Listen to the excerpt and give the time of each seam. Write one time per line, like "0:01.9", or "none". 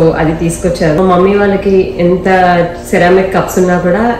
0:01.0